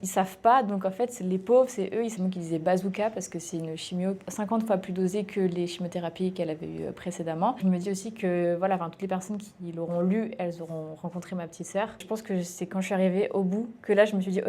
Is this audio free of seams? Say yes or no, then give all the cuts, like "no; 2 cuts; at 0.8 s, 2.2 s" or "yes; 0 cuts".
no; 4 cuts; at 2.1 s, 4.2 s, 7.6 s, 12.0 s